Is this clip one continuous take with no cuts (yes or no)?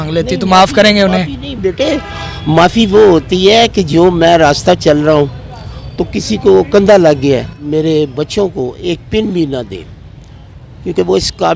no